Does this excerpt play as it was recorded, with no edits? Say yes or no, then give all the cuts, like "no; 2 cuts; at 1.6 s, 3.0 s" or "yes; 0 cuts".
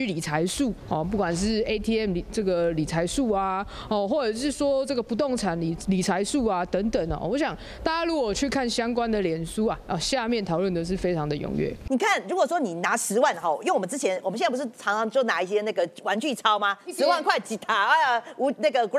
no; 1 cut; at 11.8 s